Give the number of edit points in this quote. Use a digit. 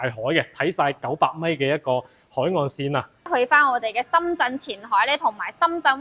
1